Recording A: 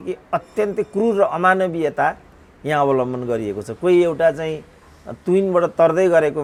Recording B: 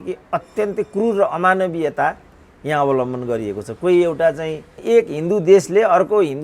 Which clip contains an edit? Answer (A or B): B